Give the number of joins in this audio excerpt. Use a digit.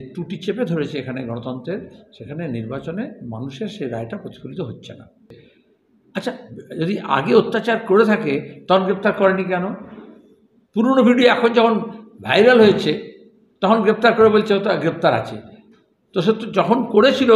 1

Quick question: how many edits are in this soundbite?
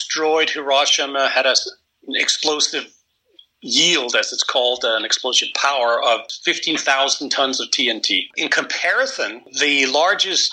3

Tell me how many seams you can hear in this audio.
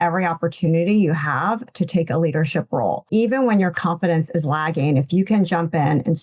2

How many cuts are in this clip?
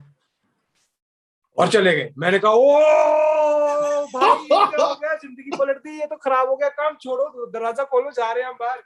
0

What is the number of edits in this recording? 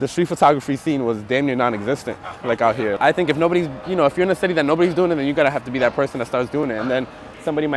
1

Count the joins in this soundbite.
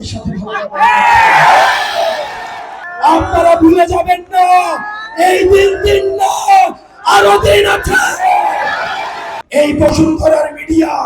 2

